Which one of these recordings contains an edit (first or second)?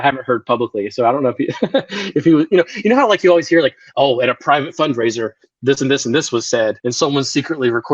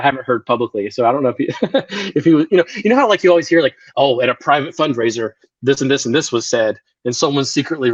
first